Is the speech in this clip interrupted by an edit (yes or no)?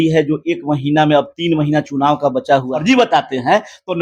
yes